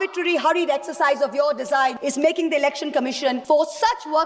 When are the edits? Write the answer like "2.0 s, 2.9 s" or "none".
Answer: 2.0 s, 3.4 s